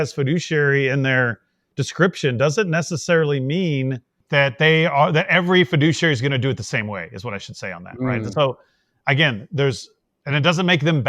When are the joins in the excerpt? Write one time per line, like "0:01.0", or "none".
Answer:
none